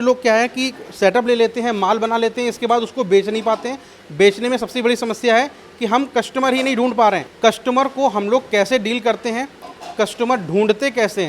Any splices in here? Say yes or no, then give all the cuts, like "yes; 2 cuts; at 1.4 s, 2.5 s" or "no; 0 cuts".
yes; 1 cut; at 7.3 s